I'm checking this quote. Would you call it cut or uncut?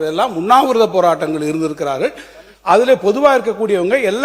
uncut